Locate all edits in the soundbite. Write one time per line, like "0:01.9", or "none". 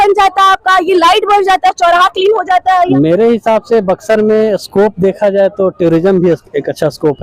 0:02.9